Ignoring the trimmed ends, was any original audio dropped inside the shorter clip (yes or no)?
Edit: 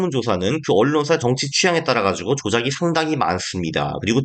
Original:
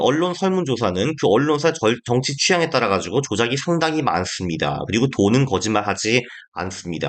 yes